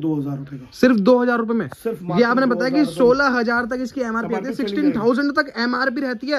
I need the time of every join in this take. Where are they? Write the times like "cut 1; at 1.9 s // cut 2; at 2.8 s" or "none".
none